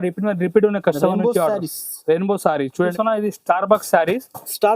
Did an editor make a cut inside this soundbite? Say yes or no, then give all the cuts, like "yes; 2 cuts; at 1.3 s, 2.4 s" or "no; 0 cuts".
yes; 1 cut; at 2.7 s